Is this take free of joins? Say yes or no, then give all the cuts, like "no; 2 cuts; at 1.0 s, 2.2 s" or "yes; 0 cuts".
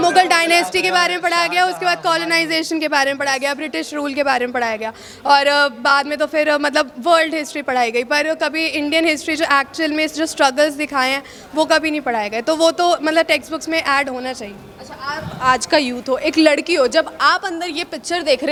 yes; 0 cuts